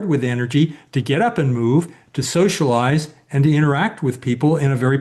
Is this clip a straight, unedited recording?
yes; 0 cuts

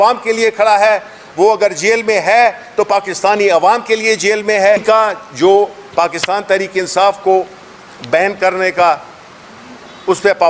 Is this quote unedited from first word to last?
no; 1 cut; at 4.8 s

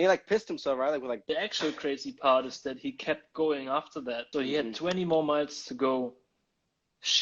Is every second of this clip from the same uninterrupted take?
no; 2 cuts; at 1.2 s, 4.2 s

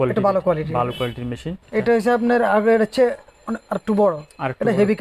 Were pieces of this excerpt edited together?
yes; 1 cut; at 1.5 s

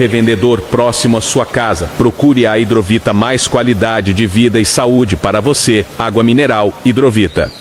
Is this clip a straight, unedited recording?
yes; 0 cuts

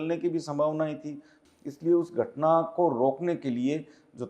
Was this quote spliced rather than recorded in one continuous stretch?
yes; 1 cut; at 1.4 s

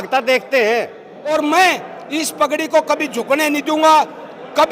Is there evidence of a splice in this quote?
yes; 1 cut; at 1.1 s

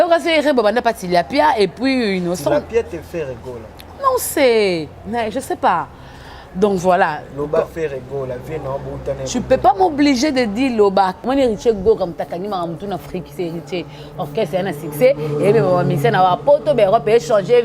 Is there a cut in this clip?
yes; 1 cut; at 11.1 s

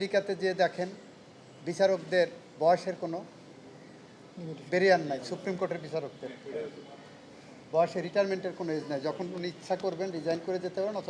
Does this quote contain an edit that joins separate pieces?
no; 0 cuts

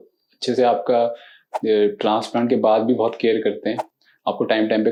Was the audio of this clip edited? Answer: no; 0 cuts

